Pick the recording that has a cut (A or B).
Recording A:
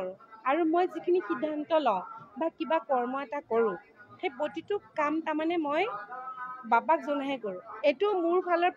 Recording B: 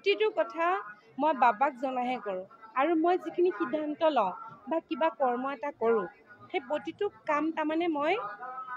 A